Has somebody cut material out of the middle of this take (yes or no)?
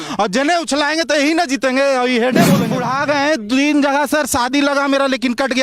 yes